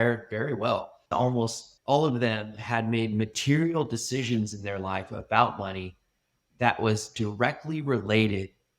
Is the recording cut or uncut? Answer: cut